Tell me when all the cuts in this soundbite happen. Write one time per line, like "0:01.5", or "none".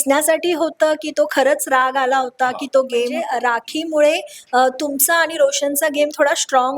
0:03.2